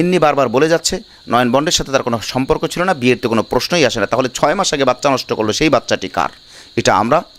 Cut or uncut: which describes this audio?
uncut